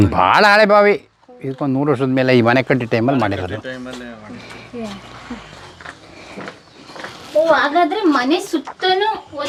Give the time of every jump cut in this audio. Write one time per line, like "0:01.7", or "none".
none